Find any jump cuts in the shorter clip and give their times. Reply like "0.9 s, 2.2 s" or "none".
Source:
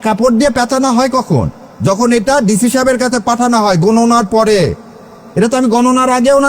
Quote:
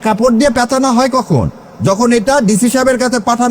none